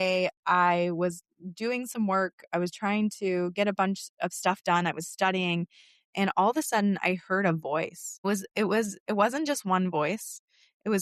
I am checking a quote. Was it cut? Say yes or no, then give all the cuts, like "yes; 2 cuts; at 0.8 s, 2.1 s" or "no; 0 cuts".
no; 0 cuts